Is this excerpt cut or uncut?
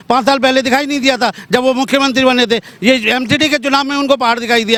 uncut